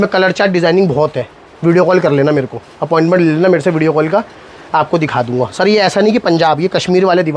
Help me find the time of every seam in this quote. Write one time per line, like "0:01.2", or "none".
none